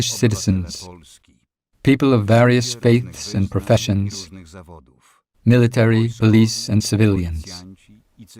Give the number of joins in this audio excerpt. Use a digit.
1